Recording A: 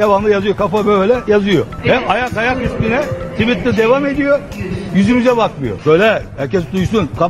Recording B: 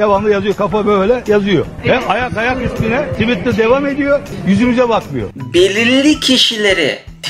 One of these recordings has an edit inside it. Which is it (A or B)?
B